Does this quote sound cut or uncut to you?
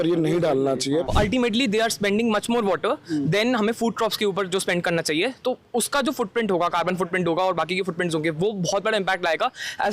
cut